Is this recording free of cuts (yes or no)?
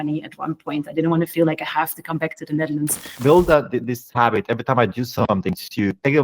no